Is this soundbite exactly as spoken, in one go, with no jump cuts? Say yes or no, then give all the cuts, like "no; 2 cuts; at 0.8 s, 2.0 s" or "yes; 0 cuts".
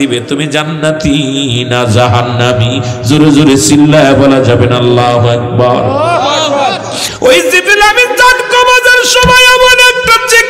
no; 1 cut; at 7.0 s